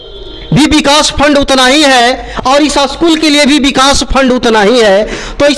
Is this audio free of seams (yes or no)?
yes